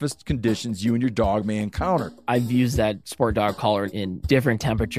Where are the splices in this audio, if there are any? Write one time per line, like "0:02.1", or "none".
0:02.2
0:04.0